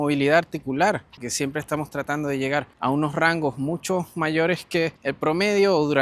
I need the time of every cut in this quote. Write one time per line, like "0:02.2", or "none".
0:01.2
0:02.7
0:05.0